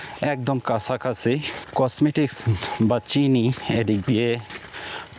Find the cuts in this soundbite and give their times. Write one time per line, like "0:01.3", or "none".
0:01.6